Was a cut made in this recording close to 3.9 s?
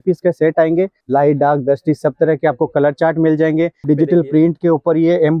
yes; 2 cuts; at 1.0 s, 3.9 s

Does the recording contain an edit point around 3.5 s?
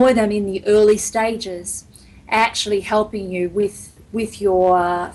no; 0 cuts

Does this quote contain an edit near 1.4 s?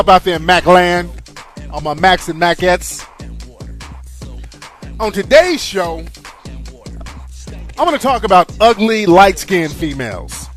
no; 0 cuts

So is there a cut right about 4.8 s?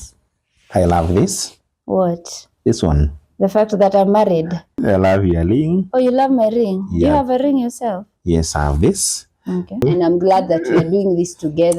yes; 2 cuts; at 4.8 s, 9.8 s

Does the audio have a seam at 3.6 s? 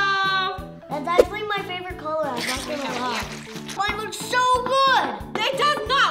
yes; 1 cut; at 3.6 s

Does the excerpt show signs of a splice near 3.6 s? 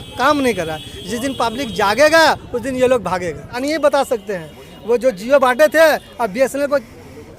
yes; 1 cut; at 3.6 s

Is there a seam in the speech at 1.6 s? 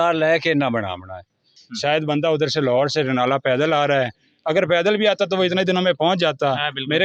yes; 1 cut; at 1.6 s

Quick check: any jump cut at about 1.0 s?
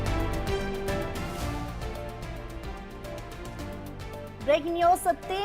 yes; 1 cut; at 1.0 s

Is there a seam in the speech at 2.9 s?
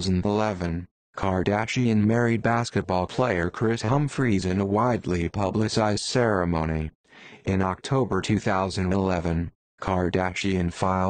yes; 1 cut; at 2.9 s

